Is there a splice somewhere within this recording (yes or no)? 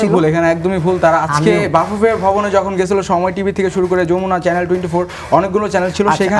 no